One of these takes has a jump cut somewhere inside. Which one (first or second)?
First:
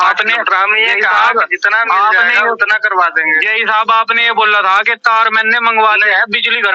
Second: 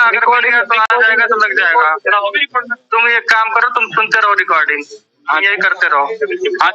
second